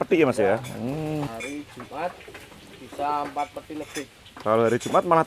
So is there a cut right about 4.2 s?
no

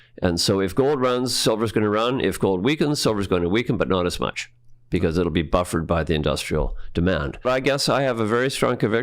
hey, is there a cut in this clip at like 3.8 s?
no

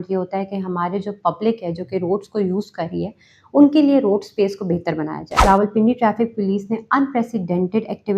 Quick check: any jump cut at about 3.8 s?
no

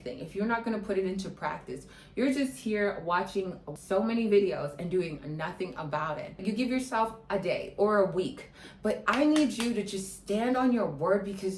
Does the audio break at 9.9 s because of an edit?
no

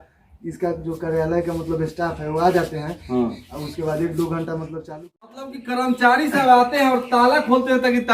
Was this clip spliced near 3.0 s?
no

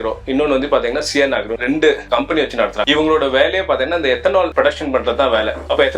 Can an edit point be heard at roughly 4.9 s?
no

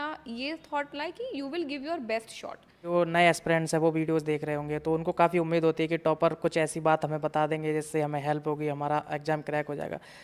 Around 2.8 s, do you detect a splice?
yes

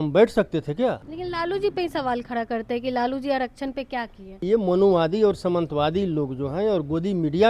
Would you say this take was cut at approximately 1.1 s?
yes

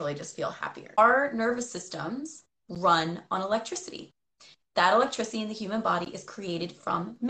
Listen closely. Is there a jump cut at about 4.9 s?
no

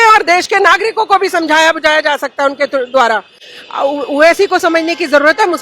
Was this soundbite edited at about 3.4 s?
no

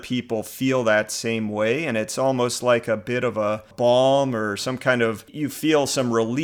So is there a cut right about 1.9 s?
no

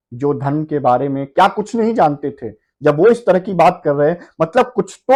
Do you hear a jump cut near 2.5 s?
no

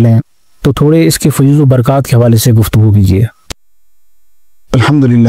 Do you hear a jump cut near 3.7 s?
no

